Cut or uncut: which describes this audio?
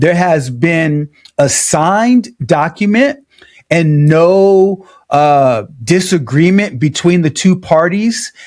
uncut